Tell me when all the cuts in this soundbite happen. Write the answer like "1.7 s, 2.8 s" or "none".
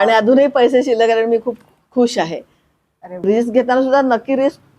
3.2 s

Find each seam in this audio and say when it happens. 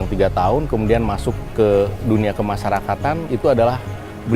1.4 s

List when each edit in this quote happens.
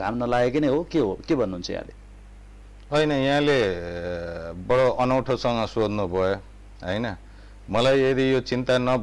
none

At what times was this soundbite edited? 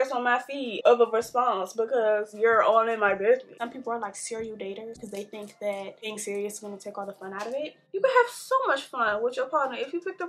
0.8 s, 3.6 s, 5.0 s, 6.1 s, 7.8 s

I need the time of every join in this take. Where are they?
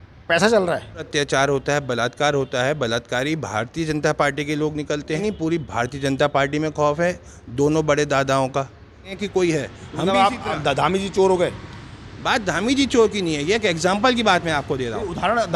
1.1 s, 5.2 s, 9.1 s

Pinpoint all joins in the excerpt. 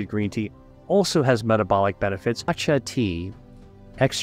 2.6 s

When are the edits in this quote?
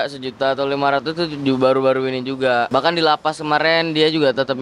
2.7 s

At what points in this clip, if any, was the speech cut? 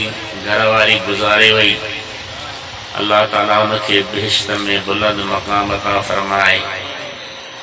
none

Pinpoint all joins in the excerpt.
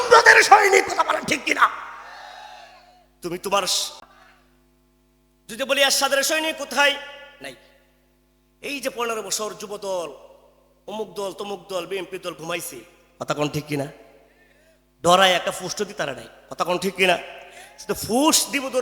4.1 s

